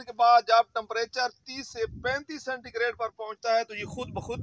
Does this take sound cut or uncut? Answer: uncut